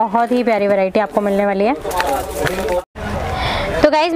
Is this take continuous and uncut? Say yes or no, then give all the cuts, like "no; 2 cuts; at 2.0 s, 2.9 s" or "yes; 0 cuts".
yes; 0 cuts